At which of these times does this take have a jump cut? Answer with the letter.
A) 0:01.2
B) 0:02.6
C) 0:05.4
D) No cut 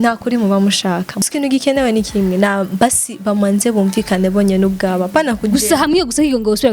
A